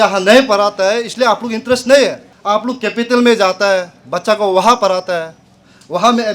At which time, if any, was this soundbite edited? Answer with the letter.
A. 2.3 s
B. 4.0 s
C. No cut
A